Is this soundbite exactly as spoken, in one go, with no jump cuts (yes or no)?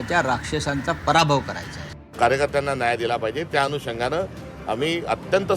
no